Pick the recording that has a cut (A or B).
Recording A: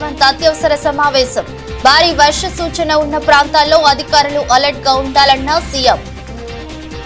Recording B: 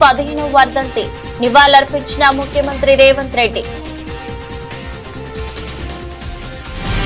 A